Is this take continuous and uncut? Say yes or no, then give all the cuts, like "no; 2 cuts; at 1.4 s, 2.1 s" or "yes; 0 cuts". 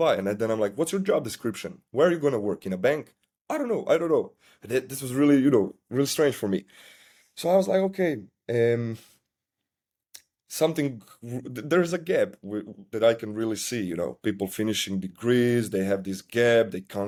yes; 0 cuts